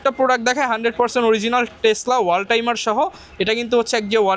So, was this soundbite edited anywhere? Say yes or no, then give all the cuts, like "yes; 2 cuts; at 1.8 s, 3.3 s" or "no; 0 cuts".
no; 0 cuts